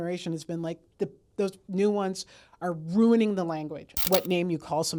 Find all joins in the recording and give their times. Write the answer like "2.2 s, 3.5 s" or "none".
4.1 s

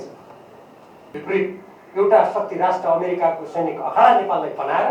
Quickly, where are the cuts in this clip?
1.2 s

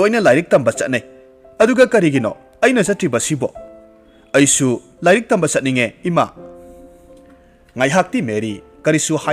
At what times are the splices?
6.3 s, 7.7 s

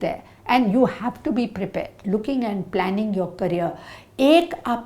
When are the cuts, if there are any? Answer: 2.0 s

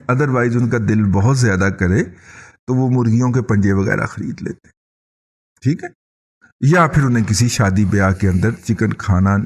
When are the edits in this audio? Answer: none

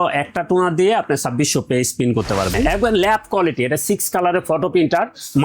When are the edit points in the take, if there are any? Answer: 2.5 s

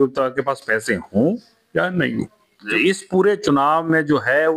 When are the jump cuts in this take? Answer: 2.6 s

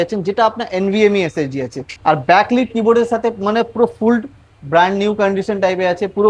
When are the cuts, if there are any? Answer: 1.9 s

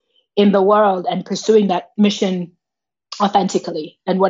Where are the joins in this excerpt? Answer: 1.9 s

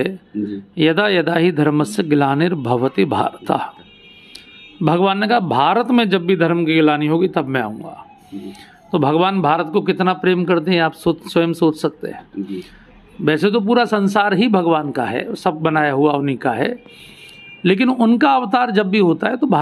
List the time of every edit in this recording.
none

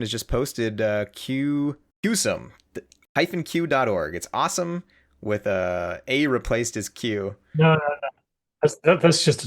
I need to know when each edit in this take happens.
1.9 s

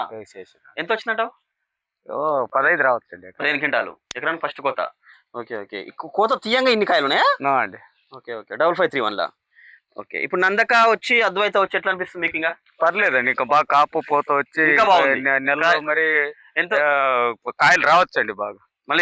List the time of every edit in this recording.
none

